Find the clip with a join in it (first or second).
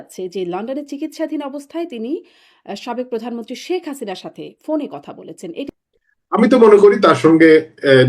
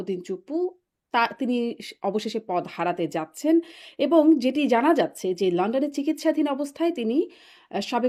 first